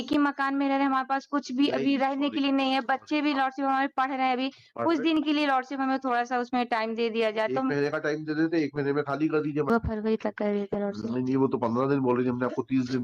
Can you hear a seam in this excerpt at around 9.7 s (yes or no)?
yes